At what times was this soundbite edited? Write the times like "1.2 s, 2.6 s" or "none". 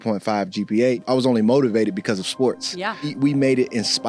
1.0 s, 3.1 s